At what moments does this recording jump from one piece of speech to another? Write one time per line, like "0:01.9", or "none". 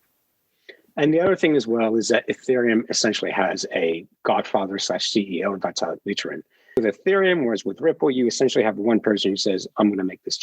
0:06.8